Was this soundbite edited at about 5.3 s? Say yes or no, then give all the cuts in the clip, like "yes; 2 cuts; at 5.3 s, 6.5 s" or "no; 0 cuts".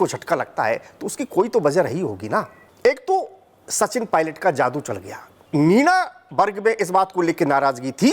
yes; 2 cuts; at 2.6 s, 5.3 s